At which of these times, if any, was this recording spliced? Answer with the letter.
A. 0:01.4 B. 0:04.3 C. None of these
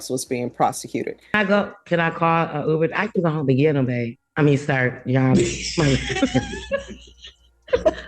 A